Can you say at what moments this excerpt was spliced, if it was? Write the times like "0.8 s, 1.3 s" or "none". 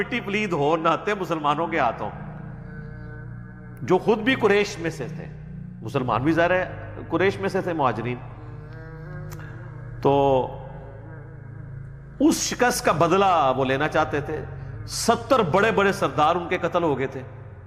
2.1 s, 3.8 s